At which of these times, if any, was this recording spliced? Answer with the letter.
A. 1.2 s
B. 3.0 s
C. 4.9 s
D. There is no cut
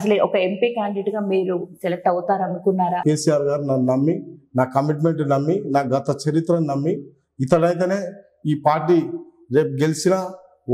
B